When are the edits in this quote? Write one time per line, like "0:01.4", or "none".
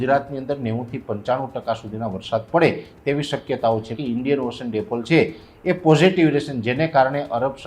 0:03.9

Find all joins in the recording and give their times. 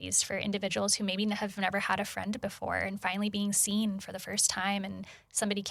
none

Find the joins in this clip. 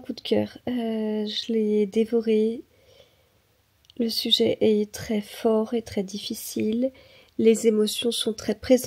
none

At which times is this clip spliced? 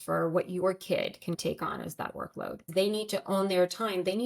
0:01.4
0:02.7

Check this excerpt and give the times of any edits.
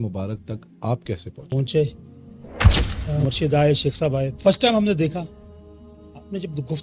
0:01.5

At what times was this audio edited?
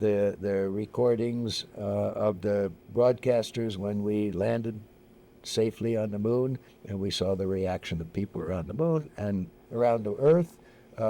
none

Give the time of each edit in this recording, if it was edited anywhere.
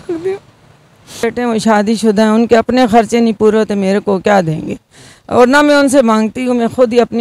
0:01.2

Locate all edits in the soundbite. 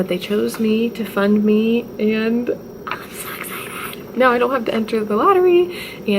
none

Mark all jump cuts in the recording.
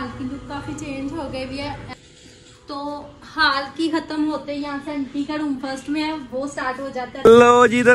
0:01.9
0:07.1

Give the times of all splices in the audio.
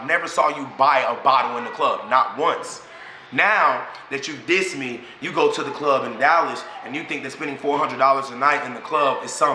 none

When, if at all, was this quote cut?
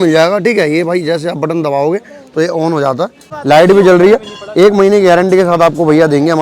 0:03.3

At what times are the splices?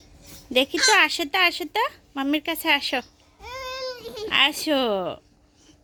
none

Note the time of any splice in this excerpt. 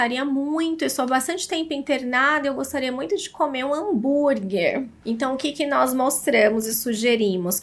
0:04.9

